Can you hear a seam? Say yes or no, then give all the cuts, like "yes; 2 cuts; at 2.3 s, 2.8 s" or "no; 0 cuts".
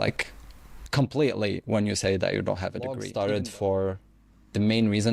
yes; 1 cut; at 3.1 s